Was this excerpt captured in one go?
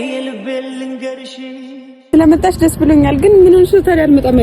no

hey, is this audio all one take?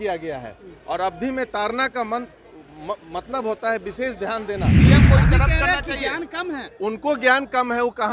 no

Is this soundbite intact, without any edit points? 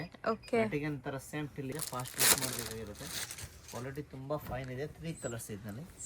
no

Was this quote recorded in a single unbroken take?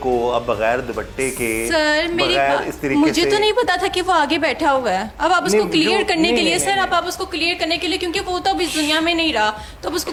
yes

